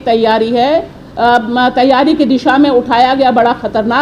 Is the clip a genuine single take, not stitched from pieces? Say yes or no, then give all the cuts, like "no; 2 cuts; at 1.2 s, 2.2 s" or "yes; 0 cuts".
yes; 0 cuts